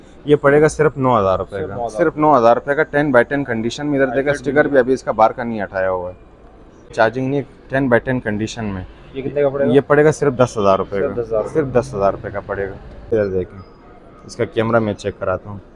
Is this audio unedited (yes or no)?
no